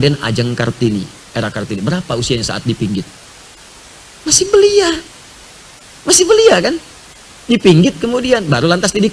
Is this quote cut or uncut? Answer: uncut